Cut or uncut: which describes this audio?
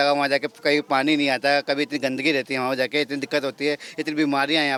uncut